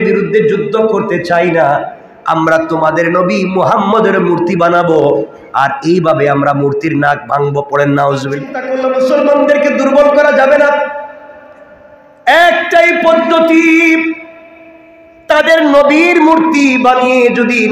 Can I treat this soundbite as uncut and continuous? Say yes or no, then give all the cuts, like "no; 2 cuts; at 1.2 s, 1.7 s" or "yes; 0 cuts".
no; 1 cut; at 8.6 s